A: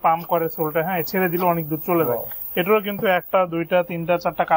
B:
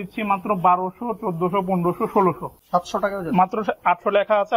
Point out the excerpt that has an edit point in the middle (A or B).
B